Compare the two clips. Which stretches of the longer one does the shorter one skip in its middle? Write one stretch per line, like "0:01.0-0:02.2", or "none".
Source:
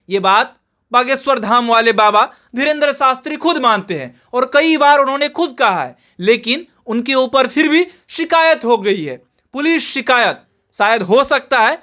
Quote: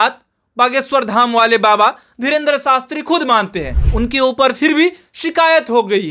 0:04.1-0:06.7